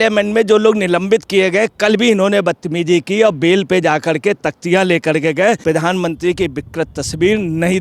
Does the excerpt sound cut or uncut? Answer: cut